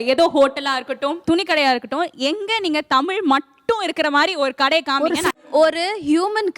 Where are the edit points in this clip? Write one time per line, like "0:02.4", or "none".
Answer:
0:05.4